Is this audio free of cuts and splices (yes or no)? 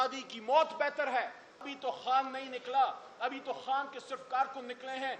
no